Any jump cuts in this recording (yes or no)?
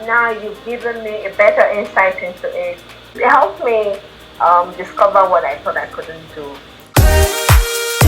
yes